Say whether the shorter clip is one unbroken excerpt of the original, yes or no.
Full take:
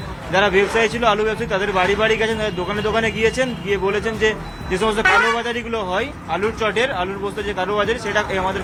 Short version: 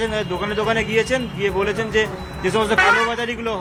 yes